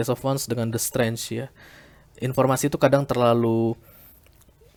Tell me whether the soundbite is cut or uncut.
uncut